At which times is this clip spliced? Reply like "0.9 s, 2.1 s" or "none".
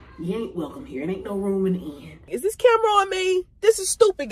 2.3 s